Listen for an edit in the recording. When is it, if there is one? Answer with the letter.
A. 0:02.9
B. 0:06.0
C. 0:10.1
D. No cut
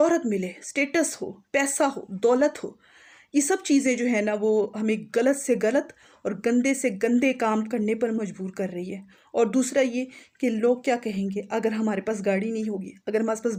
D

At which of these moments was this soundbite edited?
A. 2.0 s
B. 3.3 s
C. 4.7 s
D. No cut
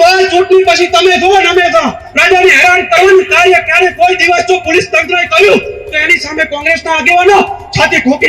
A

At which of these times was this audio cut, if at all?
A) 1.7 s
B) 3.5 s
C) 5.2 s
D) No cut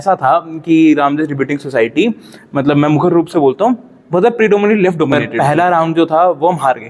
C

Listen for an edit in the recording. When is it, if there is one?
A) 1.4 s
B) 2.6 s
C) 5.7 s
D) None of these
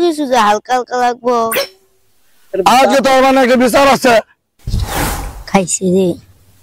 B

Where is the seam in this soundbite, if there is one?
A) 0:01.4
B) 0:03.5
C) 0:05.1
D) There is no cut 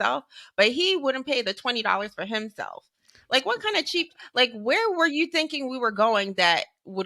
D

